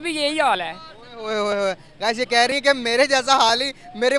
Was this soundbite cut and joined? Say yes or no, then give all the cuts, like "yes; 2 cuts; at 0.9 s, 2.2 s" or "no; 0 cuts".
no; 0 cuts